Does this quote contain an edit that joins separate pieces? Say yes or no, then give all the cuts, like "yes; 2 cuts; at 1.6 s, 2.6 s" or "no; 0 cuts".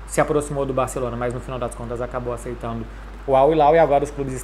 no; 0 cuts